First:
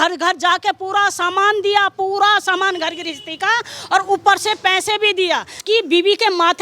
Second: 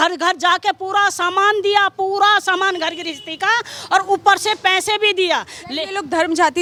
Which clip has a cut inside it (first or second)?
first